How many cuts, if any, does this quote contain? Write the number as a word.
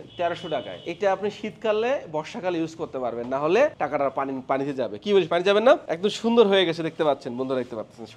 zero